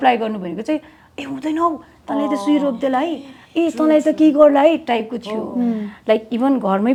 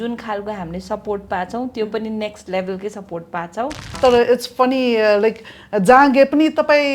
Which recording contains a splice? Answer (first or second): second